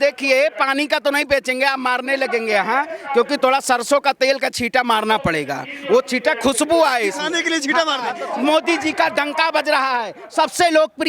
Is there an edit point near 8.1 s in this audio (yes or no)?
yes